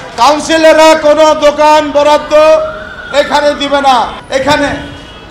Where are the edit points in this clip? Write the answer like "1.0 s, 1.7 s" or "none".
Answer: 4.1 s

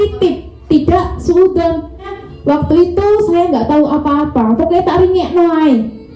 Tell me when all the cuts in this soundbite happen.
2.2 s

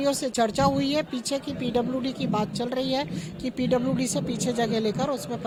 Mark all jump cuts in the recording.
none

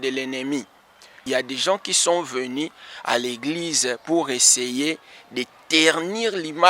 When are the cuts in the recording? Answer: 1.2 s

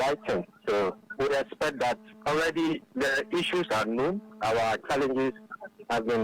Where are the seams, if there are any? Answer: 1.0 s

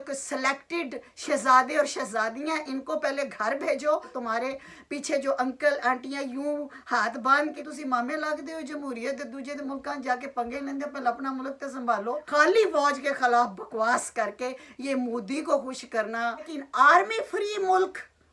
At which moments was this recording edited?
4.1 s, 7.6 s, 12.2 s, 16.5 s

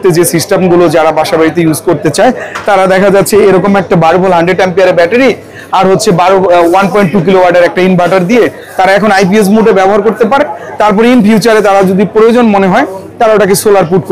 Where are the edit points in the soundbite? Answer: none

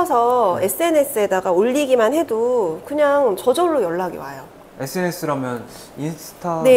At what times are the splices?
none

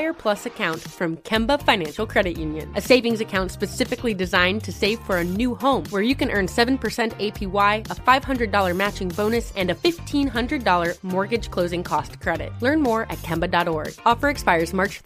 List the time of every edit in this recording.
none

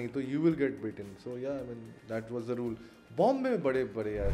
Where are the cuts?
none

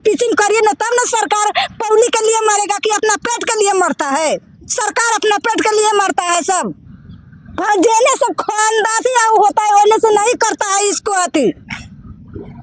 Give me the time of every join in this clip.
none

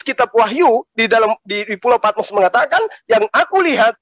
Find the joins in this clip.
none

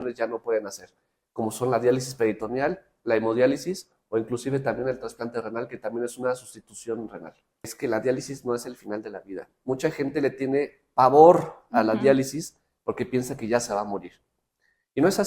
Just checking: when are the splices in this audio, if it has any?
7.7 s

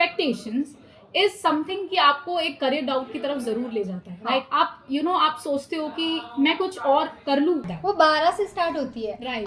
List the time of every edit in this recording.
7.7 s

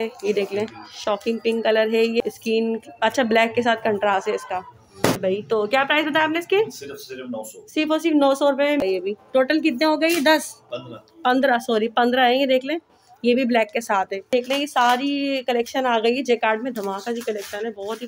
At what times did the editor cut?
2.2 s, 5.2 s, 8.8 s, 14.3 s

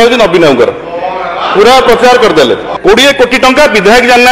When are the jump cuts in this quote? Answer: 2.7 s

